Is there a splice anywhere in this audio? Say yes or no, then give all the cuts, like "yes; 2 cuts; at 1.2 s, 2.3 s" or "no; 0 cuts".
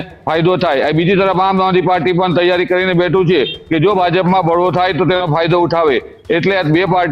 no; 0 cuts